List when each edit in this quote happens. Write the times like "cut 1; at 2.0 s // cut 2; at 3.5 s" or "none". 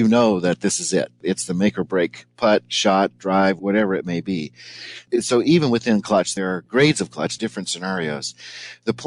cut 1; at 1.2 s // cut 2; at 3.6 s // cut 3; at 5.0 s // cut 4; at 6.3 s // cut 5; at 7.3 s

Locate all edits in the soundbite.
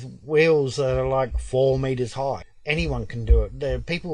cut 1; at 2.5 s

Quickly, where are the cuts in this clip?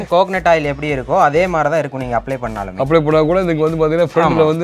none

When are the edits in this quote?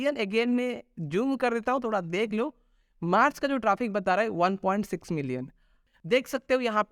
cut 1; at 5.8 s

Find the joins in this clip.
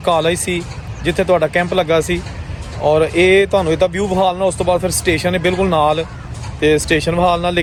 none

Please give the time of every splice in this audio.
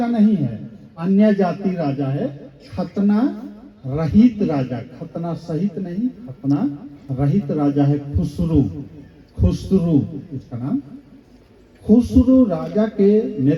none

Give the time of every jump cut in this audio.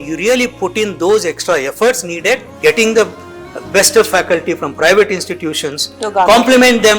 cut 1; at 2.5 s

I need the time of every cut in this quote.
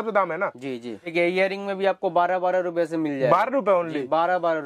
cut 1; at 1.1 s

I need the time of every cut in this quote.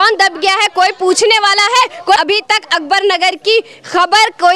cut 1; at 2.2 s

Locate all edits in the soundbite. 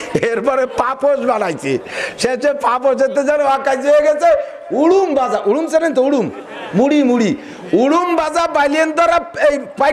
none

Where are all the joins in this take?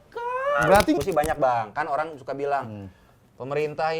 cut 1; at 1.0 s

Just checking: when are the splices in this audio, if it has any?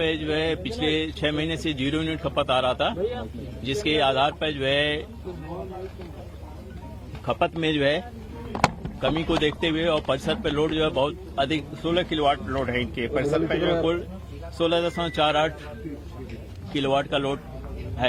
none

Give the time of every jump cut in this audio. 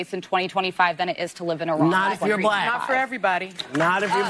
none

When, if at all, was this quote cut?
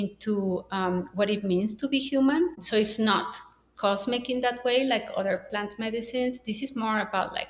cut 1; at 2.6 s

